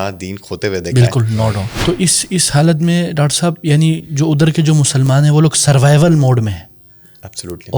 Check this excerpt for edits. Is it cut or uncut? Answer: cut